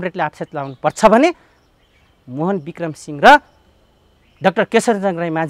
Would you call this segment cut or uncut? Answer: uncut